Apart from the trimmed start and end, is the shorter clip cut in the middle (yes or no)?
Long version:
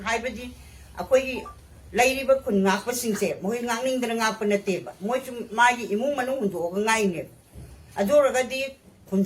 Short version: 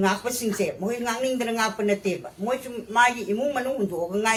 no